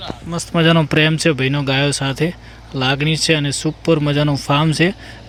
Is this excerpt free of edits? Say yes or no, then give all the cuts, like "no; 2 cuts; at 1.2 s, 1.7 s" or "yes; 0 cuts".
yes; 0 cuts